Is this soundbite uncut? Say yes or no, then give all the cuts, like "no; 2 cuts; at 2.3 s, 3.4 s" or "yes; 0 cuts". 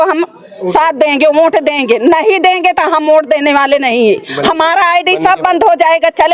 yes; 0 cuts